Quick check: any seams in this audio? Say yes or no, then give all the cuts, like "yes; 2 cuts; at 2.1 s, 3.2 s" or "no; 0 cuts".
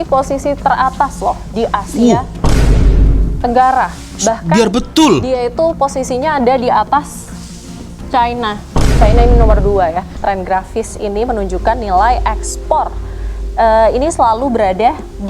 yes; 1 cut; at 10.1 s